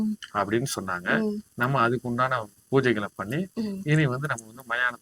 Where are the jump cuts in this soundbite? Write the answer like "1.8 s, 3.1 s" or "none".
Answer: none